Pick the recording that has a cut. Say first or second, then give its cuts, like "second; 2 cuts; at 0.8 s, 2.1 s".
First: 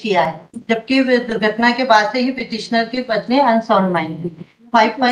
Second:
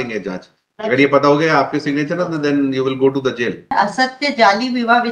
second; 1 cut; at 3.7 s